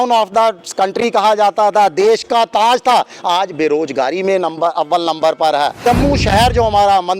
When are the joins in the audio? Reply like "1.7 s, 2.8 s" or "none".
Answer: 5.8 s